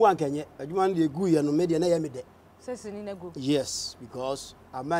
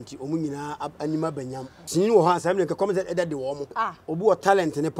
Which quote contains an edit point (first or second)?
second